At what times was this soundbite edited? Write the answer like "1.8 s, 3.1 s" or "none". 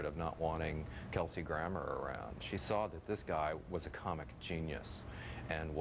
none